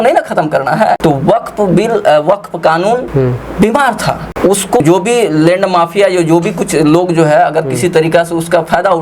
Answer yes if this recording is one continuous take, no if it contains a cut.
no